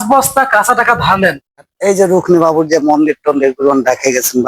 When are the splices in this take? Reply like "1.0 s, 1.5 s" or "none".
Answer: 1.7 s